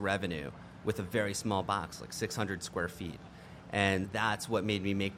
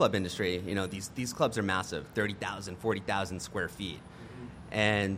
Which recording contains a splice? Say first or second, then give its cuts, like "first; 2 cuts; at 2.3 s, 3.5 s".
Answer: first; 1 cut; at 4.1 s